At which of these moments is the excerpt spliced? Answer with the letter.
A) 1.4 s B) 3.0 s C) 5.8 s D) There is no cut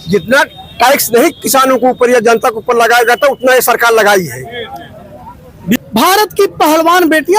C